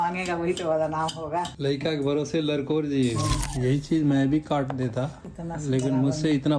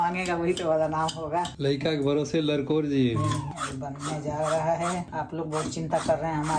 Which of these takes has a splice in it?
first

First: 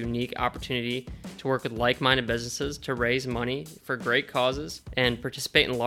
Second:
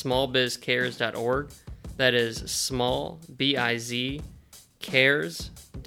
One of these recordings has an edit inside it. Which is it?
first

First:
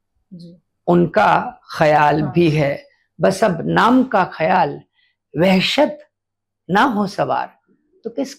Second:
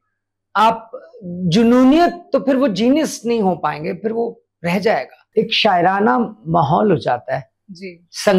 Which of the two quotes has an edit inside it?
second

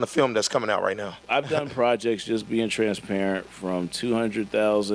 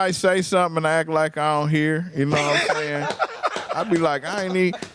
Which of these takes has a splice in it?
first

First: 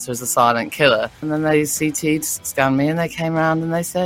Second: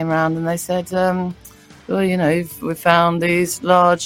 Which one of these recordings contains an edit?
first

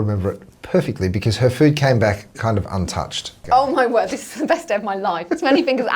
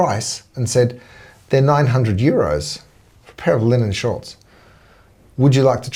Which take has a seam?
first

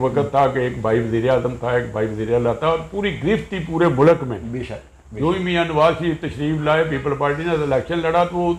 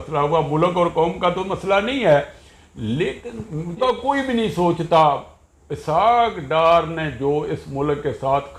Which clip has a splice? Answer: second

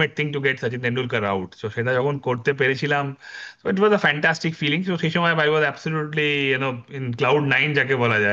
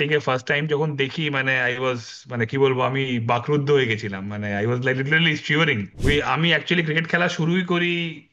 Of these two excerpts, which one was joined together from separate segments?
second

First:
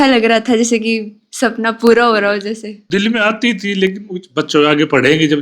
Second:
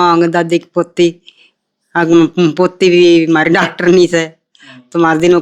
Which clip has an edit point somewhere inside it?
first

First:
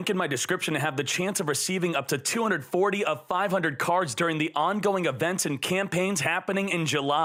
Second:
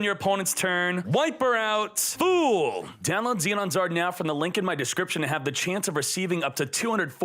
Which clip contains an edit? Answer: second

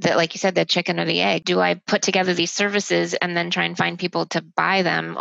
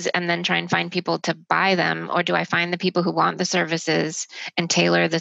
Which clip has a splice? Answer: first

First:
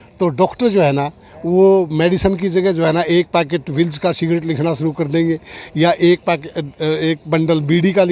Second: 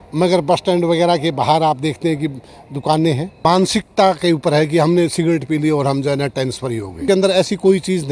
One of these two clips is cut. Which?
second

